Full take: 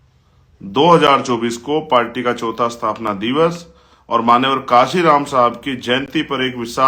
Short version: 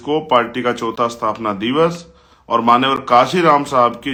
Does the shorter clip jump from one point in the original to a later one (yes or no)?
no